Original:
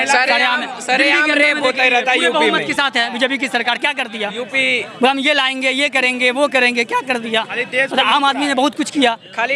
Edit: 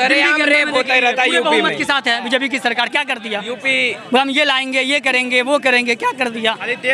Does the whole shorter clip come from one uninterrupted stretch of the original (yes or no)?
yes